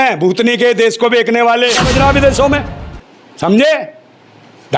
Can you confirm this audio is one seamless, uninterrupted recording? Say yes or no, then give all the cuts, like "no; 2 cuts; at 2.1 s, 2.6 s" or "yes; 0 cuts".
no; 1 cut; at 1.9 s